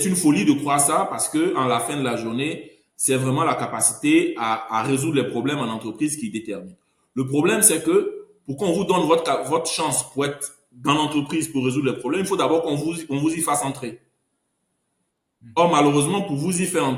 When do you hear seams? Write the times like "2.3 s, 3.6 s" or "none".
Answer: none